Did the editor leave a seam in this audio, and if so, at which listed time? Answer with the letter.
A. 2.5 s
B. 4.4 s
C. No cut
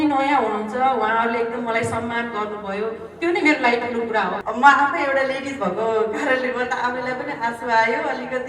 B